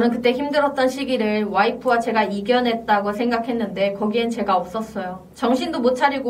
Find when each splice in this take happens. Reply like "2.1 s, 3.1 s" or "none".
5.2 s

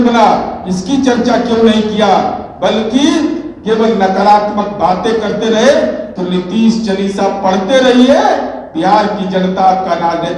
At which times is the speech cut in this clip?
none

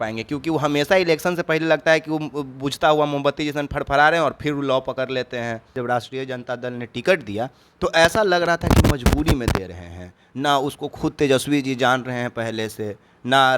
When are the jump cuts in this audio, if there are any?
5.7 s

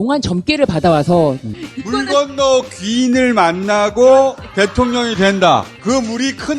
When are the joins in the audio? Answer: 1.5 s

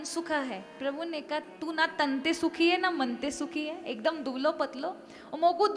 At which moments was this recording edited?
none

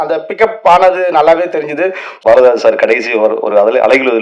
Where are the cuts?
2.2 s

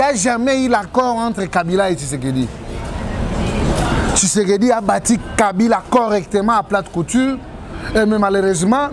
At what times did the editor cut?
none

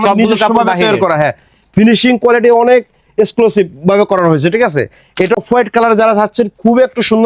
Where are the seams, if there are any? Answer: 5.4 s

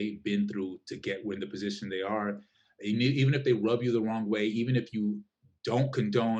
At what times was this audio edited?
none

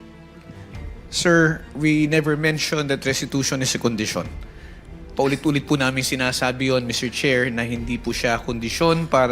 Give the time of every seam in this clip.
1.2 s

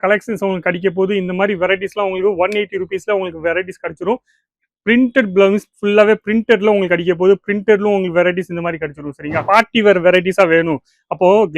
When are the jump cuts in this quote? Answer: 9.4 s

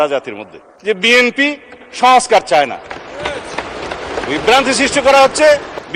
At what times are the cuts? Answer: none

